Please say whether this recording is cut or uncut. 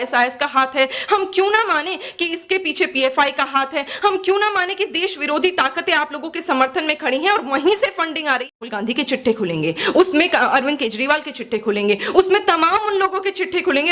cut